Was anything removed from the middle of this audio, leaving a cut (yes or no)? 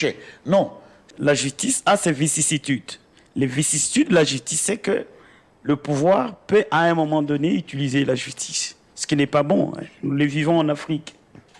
yes